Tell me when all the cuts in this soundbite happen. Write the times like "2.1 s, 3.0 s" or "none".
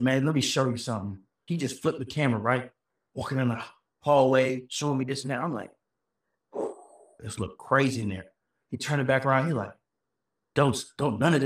none